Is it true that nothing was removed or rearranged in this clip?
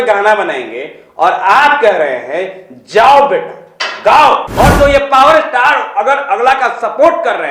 no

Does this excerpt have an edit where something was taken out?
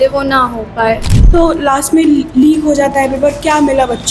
yes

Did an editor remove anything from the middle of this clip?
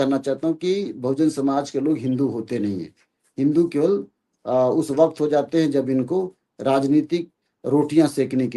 no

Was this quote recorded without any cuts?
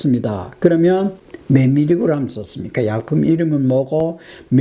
no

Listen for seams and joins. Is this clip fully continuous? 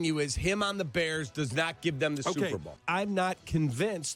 no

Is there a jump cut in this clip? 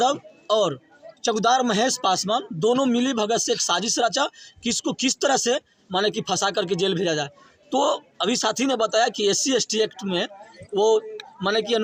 no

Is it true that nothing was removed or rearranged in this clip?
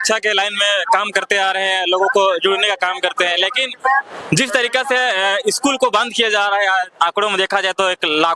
yes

